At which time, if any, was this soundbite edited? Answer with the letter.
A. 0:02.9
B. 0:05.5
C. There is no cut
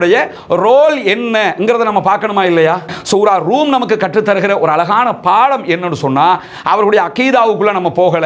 A